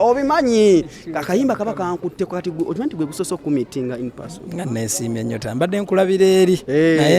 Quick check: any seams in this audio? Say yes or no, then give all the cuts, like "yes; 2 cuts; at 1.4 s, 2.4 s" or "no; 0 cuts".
no; 0 cuts